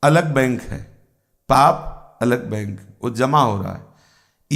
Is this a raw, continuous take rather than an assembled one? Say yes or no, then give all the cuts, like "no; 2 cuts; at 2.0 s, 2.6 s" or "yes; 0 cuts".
yes; 0 cuts